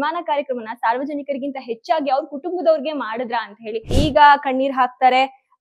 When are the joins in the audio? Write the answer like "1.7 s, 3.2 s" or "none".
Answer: 4.0 s